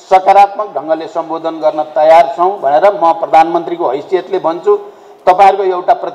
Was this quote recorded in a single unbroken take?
yes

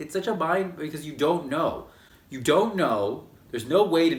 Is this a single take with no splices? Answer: yes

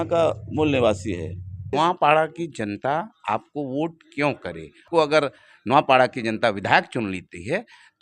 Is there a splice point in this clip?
yes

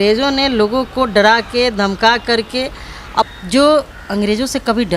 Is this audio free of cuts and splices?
no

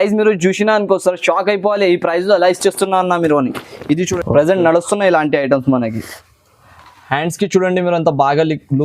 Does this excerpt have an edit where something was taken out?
yes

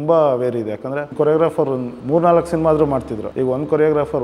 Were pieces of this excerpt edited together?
yes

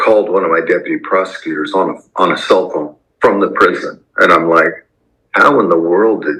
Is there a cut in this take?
no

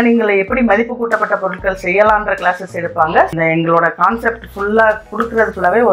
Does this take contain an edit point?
yes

